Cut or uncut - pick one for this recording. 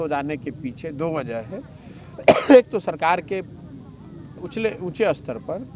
uncut